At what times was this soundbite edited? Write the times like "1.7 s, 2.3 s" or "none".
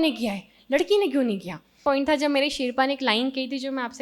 1.8 s